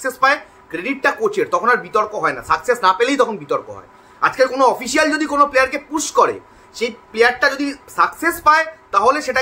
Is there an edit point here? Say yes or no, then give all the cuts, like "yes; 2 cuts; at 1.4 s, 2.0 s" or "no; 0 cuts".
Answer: no; 0 cuts